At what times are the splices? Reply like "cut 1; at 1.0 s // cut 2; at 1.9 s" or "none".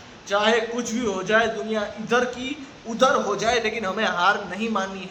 none